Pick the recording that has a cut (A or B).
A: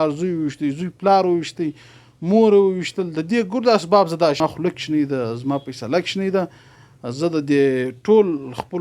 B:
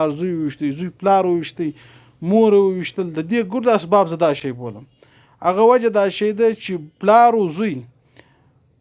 A